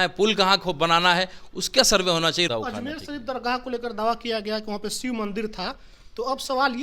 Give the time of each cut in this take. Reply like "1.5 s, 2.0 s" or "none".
2.5 s